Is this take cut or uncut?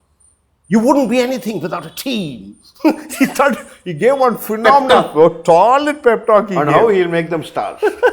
uncut